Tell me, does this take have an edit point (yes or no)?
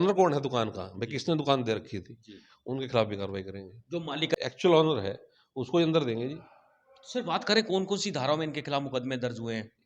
yes